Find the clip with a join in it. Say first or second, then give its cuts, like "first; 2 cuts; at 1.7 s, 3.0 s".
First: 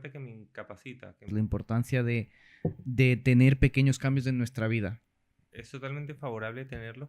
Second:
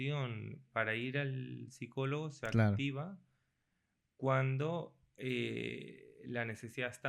first; 2 cuts; at 1.3 s, 5.0 s